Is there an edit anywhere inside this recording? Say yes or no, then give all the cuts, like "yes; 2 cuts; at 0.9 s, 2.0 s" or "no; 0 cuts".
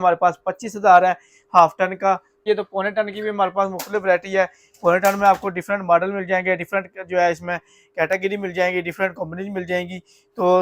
yes; 1 cut; at 2.4 s